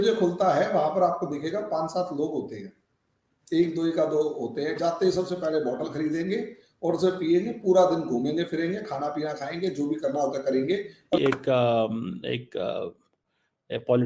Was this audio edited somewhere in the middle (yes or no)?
yes